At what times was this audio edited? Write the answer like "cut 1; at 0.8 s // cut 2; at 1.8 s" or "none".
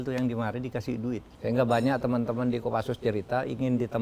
cut 1; at 1.3 s